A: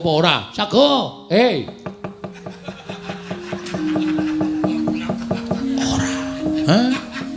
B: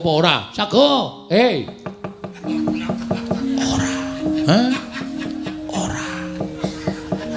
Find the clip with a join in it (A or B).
B